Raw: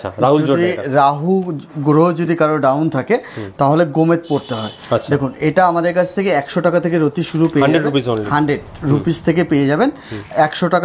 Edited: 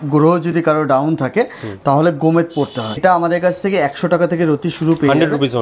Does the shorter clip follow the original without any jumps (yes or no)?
no